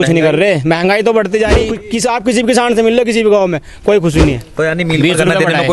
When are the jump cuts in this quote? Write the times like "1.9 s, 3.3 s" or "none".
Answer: 1.8 s, 4.5 s